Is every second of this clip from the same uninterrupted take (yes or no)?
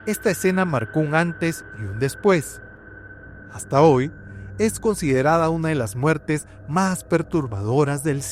yes